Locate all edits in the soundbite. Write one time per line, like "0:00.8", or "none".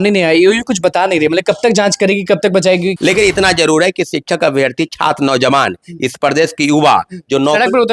0:02.9